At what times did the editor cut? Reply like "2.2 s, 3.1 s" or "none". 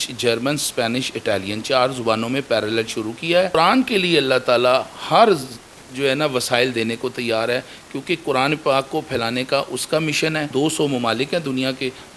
3.6 s, 10.5 s